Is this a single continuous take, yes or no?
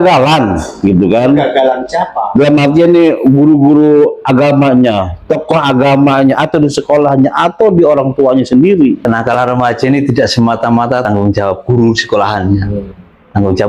no